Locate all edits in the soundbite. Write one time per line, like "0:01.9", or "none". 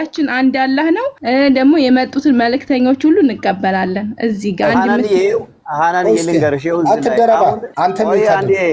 0:01.1
0:07.7